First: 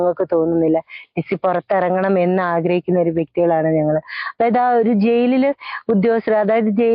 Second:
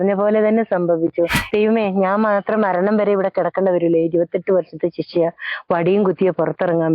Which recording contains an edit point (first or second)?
second